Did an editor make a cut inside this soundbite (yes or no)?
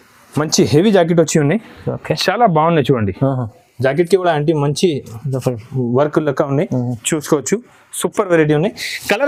no